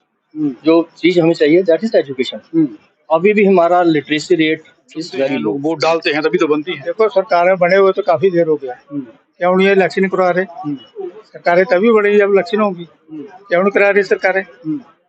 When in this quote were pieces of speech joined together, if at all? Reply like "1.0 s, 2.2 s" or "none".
5.5 s

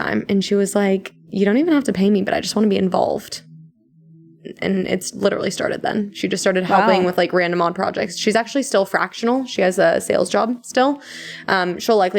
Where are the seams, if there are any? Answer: none

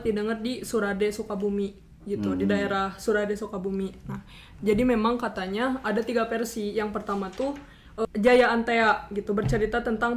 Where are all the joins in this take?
8.0 s

